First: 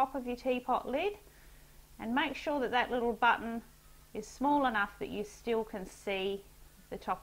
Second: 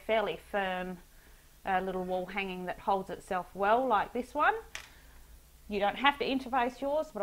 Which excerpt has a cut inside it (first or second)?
second